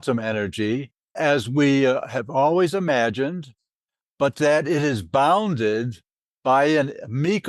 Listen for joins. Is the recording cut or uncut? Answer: cut